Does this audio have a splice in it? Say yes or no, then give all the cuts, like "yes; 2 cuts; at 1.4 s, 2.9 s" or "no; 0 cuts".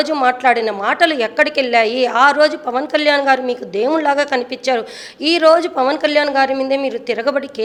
no; 0 cuts